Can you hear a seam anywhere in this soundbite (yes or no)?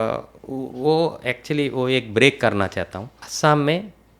yes